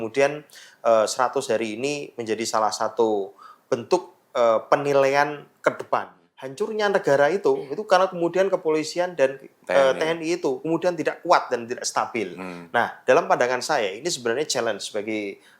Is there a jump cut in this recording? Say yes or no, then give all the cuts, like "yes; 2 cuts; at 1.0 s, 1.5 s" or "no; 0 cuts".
yes; 1 cut; at 6.4 s